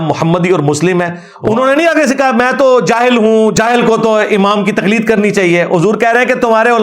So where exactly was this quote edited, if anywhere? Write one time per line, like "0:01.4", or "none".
0:01.2

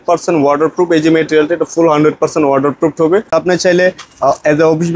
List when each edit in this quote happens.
0:03.3

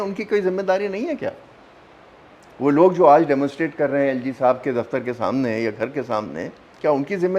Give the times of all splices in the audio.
none

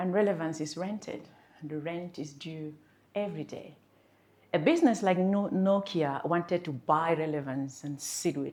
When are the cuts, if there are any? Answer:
none

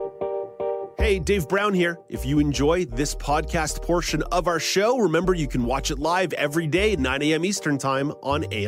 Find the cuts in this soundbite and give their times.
none

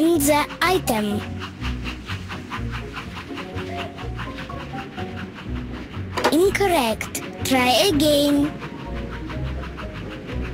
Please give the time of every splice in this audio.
0:01.0

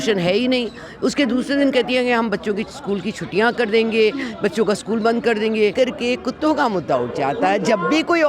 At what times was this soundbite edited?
0:05.7

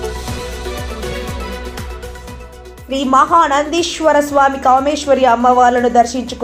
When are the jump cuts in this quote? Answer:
none

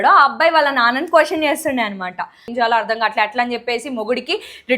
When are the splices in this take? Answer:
0:02.5

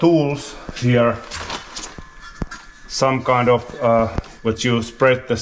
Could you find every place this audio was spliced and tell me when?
0:04.3

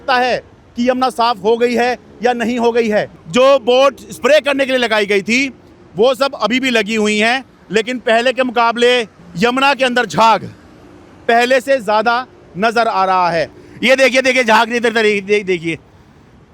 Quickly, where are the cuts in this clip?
0:03.1
0:09.1
0:13.6

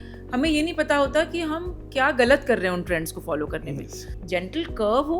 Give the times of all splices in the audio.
0:04.1

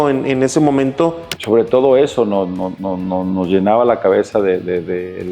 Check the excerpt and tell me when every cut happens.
0:01.3

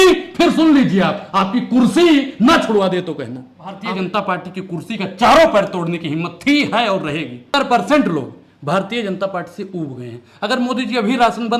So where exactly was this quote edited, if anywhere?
0:03.8
0:07.5

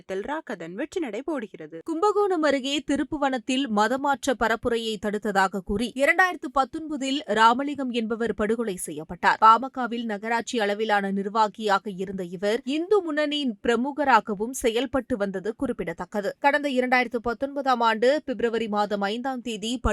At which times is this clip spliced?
0:01.8

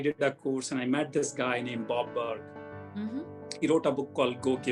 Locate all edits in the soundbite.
none

